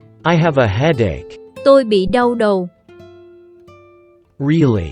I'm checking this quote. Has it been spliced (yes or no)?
yes